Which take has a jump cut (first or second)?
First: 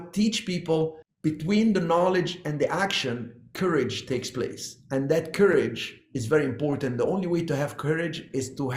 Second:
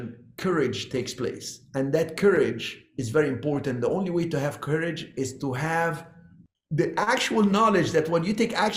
first